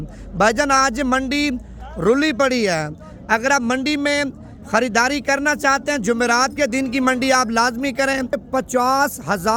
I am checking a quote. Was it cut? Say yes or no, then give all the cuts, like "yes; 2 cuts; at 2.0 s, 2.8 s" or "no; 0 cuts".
yes; 1 cut; at 8.4 s